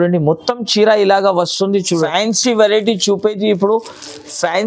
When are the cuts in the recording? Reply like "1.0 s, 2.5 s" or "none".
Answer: 1.9 s